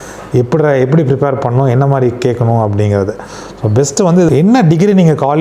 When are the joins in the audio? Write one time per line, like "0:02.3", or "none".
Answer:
0:04.3